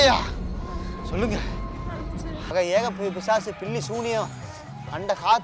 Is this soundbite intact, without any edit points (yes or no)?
no